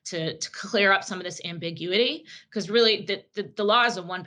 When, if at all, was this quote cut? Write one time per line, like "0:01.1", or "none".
none